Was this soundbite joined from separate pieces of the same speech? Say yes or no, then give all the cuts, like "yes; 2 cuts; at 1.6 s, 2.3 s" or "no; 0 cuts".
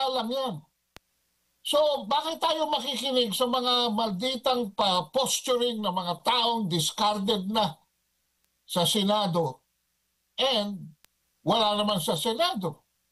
no; 0 cuts